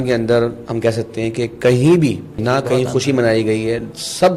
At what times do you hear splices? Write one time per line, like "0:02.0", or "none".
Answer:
0:02.4